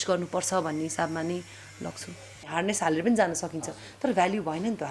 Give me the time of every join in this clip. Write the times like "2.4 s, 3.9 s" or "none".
2.4 s